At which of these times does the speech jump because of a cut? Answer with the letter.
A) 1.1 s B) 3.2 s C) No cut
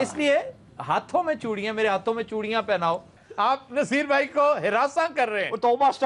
B